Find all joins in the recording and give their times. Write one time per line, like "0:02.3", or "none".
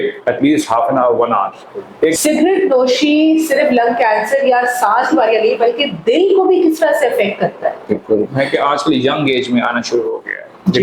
0:02.1
0:08.3